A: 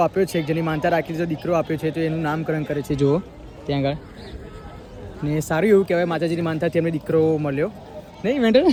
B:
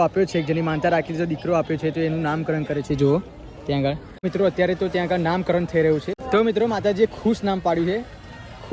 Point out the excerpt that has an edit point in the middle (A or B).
B